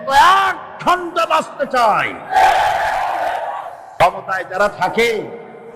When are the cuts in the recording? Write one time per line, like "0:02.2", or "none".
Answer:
0:04.0